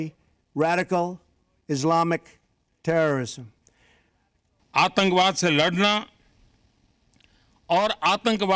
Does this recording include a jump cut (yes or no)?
yes